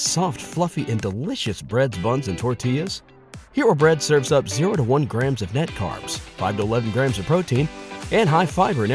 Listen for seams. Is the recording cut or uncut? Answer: uncut